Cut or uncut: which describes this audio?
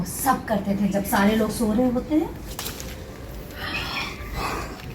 cut